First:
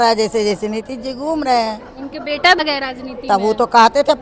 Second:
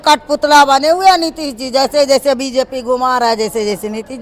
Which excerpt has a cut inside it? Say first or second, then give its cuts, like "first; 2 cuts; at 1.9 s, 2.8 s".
first; 1 cut; at 2.6 s